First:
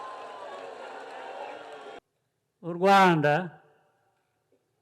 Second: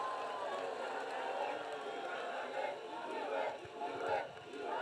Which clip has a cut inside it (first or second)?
first